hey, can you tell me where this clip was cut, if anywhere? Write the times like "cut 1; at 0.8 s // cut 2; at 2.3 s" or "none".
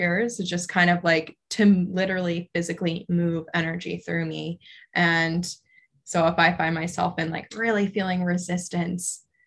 none